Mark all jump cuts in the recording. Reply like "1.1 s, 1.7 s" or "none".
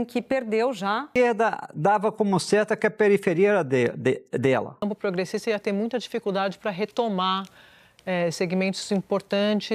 1.0 s, 4.8 s